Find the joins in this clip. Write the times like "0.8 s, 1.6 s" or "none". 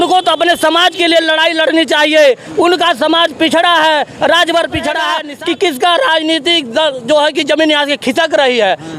5.2 s